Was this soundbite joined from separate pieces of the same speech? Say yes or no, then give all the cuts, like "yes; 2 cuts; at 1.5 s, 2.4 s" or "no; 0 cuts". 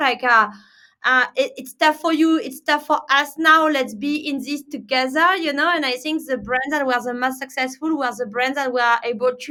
no; 0 cuts